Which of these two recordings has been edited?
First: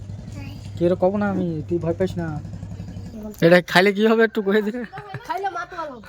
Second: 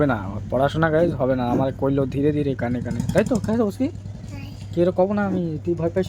first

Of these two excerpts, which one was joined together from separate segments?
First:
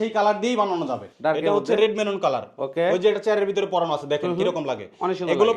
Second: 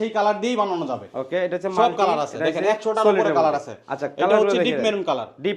first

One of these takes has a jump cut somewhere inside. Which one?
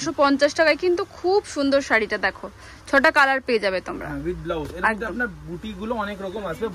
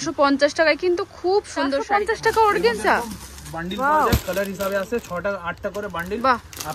second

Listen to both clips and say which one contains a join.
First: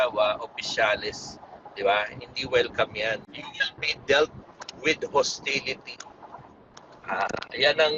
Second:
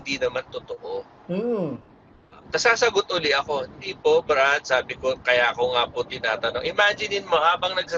first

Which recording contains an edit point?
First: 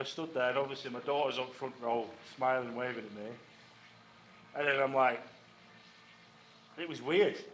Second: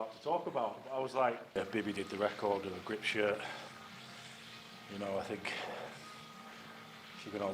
second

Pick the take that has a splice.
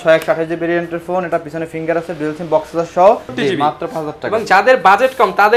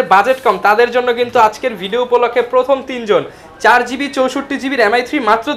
first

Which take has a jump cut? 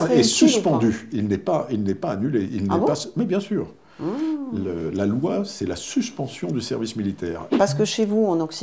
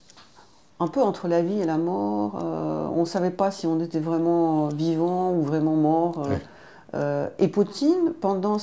first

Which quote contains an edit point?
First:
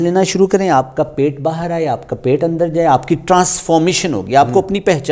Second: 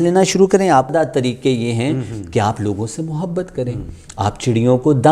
second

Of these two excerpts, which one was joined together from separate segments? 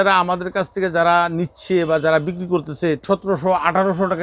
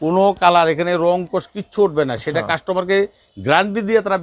first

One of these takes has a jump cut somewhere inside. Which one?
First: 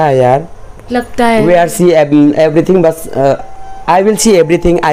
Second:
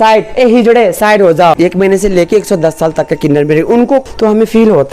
second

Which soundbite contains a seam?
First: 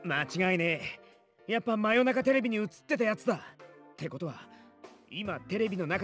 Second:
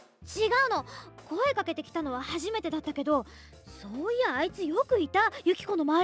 first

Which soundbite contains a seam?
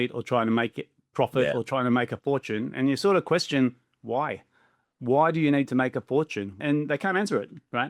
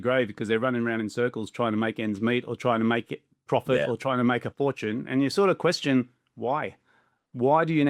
first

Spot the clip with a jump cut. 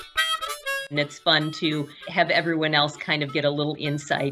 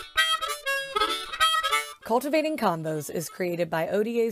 first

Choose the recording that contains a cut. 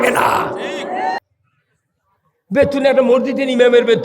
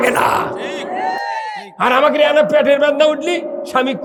first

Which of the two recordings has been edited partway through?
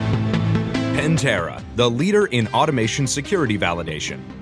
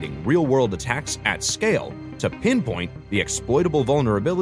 first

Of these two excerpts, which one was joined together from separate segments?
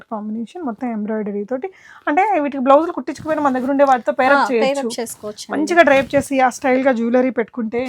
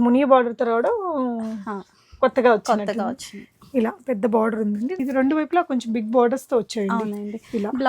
second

